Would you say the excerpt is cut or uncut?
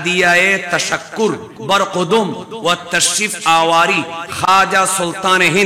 cut